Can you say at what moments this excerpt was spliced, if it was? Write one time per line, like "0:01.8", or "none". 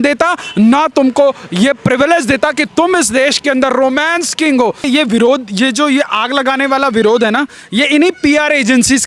0:04.8